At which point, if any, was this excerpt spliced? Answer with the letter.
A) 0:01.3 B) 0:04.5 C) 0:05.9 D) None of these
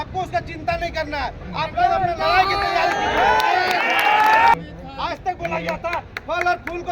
B